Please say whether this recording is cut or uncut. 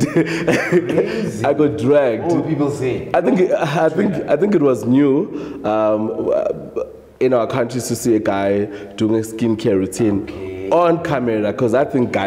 uncut